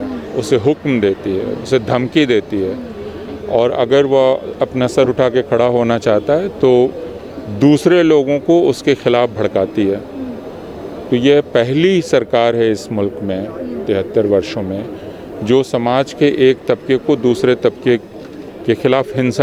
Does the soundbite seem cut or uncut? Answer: uncut